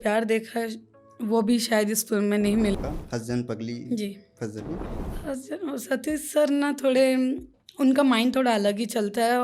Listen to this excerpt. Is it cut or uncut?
cut